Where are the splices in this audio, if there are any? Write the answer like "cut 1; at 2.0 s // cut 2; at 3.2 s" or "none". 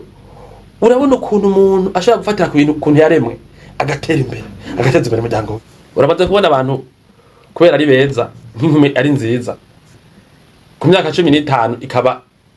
cut 1; at 5.6 s